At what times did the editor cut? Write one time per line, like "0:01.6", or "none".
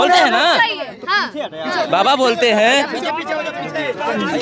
none